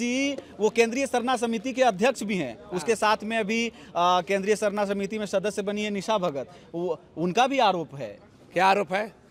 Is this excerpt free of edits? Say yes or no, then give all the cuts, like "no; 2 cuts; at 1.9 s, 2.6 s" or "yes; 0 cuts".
yes; 0 cuts